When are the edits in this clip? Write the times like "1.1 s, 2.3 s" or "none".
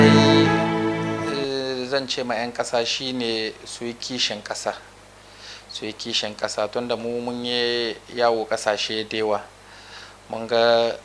0.9 s